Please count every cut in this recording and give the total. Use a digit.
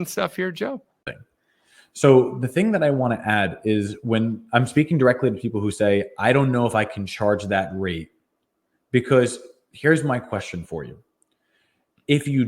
1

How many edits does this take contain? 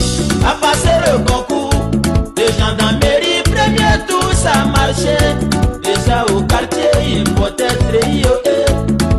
0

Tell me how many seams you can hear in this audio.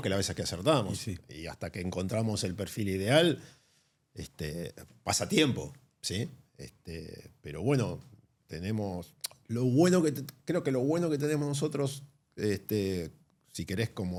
0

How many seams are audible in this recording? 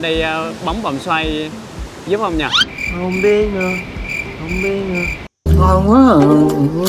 1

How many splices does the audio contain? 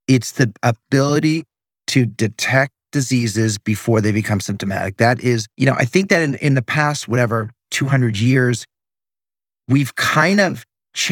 1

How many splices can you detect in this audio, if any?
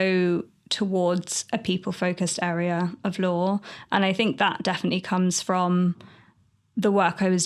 0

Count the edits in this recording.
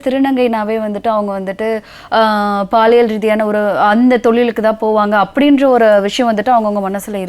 0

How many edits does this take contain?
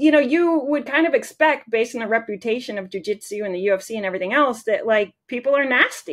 1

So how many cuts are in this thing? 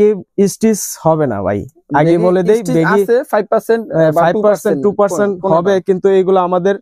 0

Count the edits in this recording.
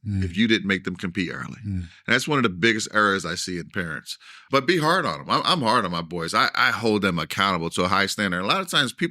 1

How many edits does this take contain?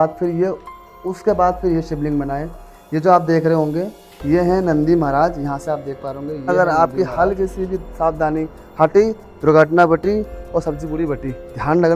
1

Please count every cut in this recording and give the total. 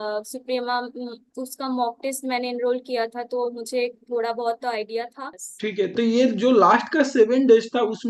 1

